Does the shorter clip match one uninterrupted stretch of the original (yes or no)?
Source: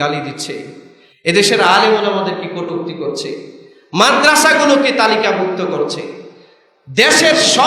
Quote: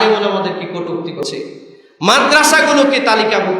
no